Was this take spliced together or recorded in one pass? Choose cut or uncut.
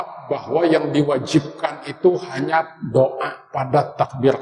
uncut